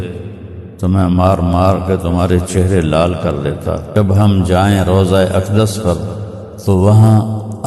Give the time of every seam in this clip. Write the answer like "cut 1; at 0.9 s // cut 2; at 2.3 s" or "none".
cut 1; at 3.9 s